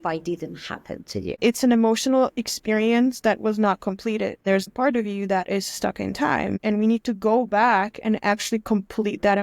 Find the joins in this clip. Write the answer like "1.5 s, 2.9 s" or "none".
1.4 s, 4.7 s, 6.6 s